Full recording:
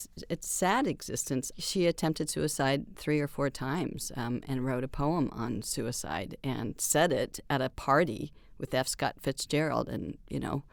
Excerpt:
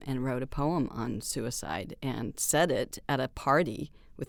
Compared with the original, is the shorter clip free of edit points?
yes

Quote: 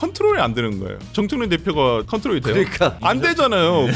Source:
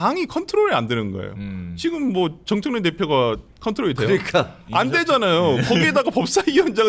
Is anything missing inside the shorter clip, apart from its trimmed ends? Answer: yes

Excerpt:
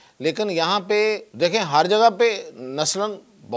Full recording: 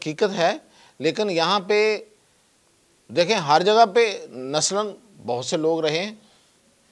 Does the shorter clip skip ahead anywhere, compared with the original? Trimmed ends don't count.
yes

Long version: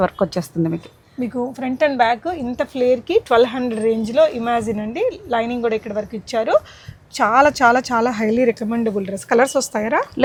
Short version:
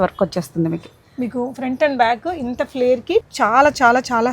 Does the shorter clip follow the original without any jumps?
no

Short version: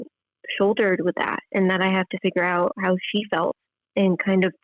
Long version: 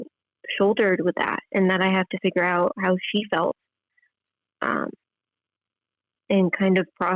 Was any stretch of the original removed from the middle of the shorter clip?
yes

